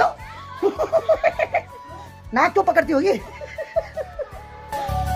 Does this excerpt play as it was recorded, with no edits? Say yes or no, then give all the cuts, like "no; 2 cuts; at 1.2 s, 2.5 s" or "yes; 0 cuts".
yes; 0 cuts